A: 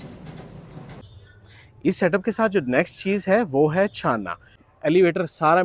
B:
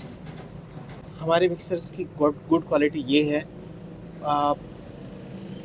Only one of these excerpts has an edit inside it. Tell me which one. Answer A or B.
A